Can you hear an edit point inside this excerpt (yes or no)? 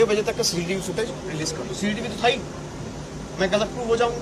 no